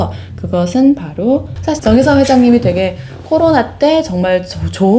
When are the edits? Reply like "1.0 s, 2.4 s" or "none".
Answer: 1.5 s